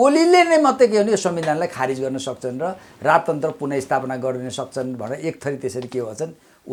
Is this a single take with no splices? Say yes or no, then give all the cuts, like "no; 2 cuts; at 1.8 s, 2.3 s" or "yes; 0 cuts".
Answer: yes; 0 cuts